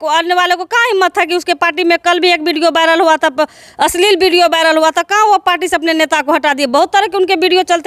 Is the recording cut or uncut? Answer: uncut